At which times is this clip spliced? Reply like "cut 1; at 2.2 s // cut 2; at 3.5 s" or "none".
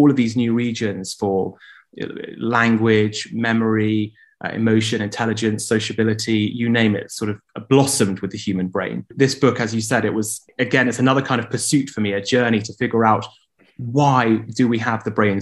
cut 1; at 9.1 s // cut 2; at 10.5 s